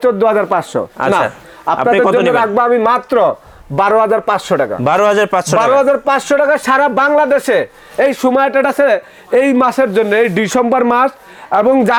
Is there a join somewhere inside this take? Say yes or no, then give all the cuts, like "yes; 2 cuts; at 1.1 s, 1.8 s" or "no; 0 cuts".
no; 0 cuts